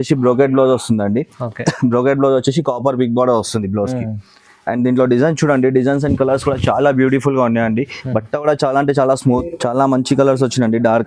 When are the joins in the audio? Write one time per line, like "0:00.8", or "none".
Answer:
0:09.4